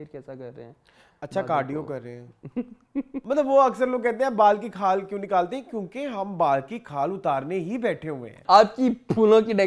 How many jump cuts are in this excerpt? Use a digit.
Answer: 2